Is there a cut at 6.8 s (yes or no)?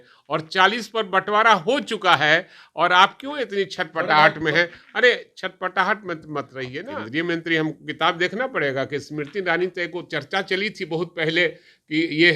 yes